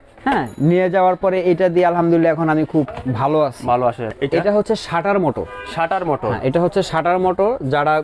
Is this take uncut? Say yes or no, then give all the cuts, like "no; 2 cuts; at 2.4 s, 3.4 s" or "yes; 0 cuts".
no; 1 cut; at 4.1 s